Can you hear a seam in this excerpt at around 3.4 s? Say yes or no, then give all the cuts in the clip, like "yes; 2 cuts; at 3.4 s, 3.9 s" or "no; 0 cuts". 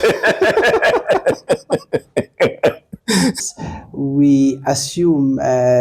yes; 1 cut; at 3.4 s